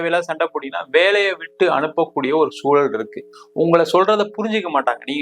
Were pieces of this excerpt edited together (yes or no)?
yes